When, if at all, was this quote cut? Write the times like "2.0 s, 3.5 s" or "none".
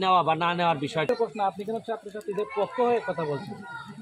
1.1 s